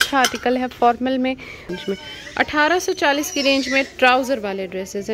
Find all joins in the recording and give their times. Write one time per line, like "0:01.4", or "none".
0:01.7